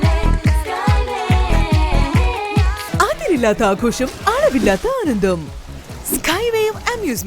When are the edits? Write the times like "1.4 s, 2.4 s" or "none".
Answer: 2.9 s